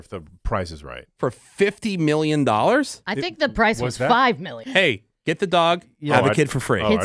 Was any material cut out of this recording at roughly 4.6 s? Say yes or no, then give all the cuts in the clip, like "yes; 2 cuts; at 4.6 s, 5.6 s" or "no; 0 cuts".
yes; 1 cut; at 4.6 s